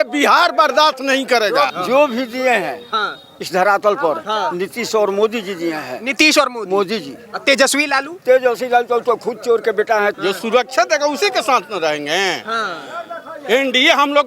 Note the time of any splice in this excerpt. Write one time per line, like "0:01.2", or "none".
0:01.8
0:10.1